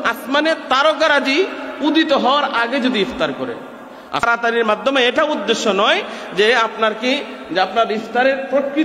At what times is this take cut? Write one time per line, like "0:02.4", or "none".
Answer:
0:04.2